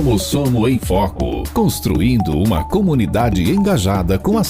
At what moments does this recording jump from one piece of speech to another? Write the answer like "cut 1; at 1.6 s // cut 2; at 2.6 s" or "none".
cut 1; at 1.5 s